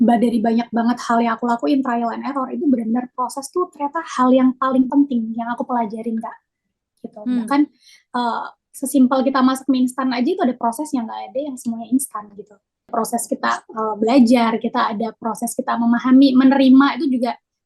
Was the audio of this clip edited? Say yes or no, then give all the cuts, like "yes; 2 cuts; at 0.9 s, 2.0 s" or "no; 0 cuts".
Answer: yes; 1 cut; at 12.9 s